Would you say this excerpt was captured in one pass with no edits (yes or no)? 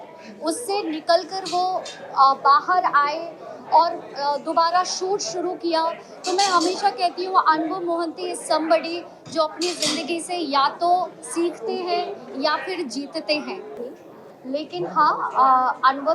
no